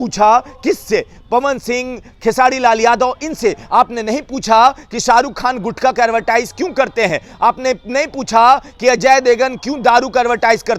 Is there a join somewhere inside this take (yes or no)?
no